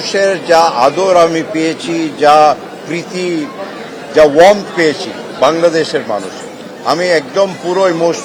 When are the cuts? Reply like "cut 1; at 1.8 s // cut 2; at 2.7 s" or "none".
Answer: none